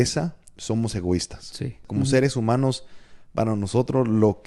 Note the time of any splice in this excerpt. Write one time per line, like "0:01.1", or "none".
0:01.8